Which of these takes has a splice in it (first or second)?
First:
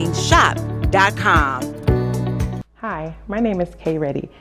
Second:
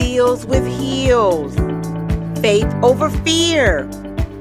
first